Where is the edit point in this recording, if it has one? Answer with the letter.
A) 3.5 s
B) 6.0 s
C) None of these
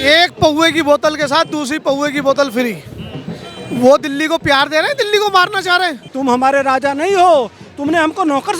B